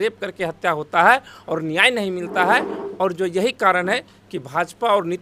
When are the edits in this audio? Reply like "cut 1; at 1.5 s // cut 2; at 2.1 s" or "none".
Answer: none